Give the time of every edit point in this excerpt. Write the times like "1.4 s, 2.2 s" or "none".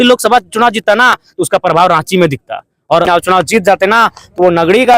3.1 s